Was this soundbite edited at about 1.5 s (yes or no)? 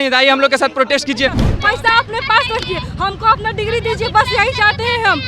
yes